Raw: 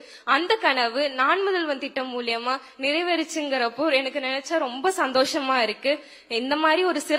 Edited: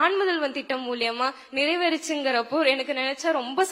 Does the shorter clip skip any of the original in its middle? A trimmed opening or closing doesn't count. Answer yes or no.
no